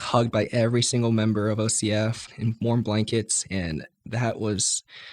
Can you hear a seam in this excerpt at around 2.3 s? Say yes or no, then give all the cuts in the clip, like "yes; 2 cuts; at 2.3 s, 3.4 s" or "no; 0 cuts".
yes; 1 cut; at 2.3 s